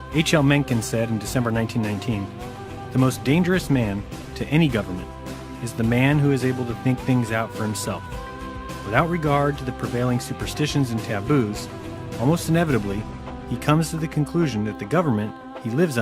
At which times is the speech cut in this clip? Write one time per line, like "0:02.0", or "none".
0:02.5